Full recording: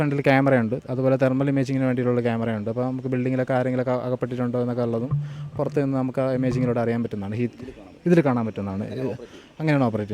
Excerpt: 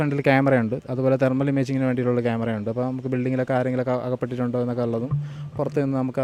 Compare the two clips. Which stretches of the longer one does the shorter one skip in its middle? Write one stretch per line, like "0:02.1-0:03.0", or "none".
none